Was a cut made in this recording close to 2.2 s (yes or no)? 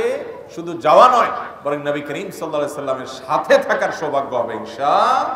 no